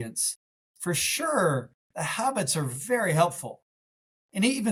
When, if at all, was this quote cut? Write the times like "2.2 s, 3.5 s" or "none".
none